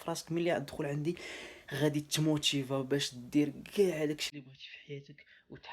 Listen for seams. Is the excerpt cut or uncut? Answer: uncut